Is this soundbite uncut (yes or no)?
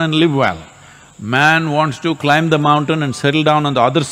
yes